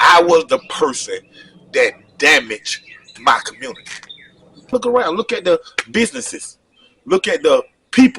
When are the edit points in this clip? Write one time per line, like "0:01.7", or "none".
0:04.7